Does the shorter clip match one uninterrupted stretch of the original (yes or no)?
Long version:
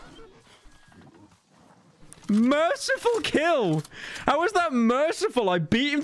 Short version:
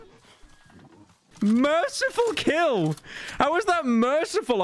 no